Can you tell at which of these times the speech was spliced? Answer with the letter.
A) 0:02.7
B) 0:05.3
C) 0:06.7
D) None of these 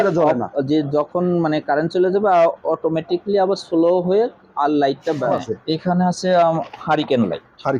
B